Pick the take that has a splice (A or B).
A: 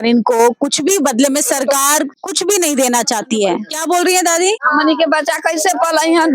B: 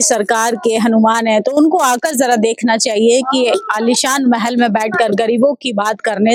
A